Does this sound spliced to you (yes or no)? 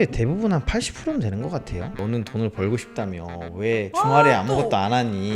no